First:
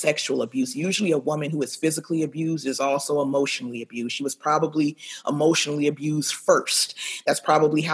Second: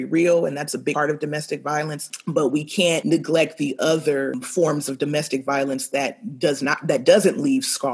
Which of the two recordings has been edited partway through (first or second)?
second